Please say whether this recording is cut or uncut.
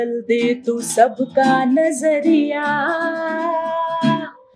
uncut